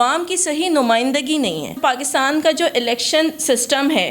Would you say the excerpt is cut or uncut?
cut